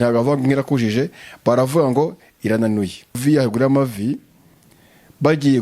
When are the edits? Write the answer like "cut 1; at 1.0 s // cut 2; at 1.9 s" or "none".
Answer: cut 1; at 3.2 s